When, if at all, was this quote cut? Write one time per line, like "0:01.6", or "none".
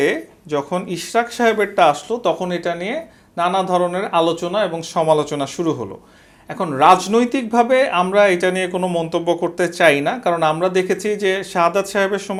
none